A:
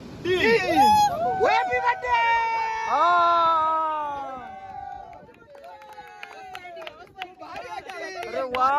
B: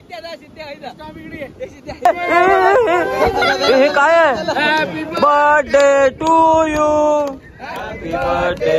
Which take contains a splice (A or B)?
B